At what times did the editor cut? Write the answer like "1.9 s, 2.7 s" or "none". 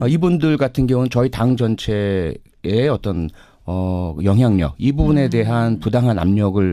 1.7 s